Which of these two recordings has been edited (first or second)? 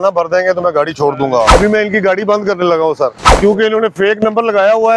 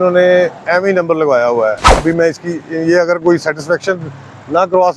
first